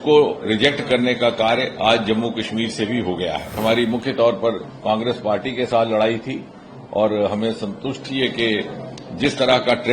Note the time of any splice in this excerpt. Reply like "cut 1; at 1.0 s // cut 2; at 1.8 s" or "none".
cut 1; at 3.6 s